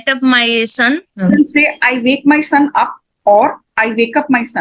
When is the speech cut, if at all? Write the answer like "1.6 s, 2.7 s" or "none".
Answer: 1.2 s